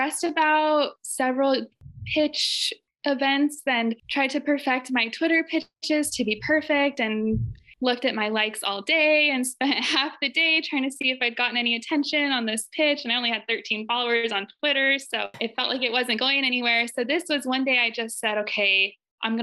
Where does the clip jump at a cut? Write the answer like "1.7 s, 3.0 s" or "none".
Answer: none